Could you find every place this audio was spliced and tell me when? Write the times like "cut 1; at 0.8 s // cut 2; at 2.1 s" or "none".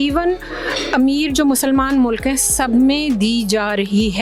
none